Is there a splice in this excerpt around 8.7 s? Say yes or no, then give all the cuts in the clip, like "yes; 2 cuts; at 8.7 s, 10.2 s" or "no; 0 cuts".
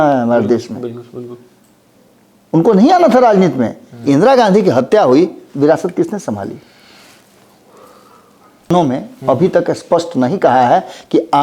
yes; 1 cut; at 8.7 s